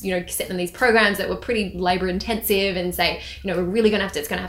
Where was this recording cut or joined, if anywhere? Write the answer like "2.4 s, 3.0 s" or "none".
none